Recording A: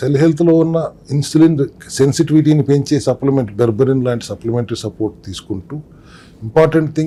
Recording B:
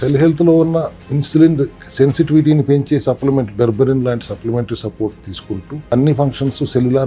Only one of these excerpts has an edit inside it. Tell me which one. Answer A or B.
B